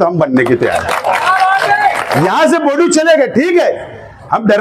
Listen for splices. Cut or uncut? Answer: cut